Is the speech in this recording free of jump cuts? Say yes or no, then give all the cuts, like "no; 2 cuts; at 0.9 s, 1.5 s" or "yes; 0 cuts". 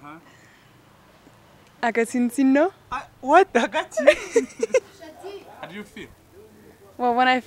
no; 1 cut; at 4.8 s